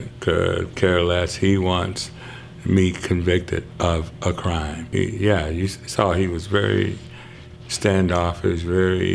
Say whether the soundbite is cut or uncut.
cut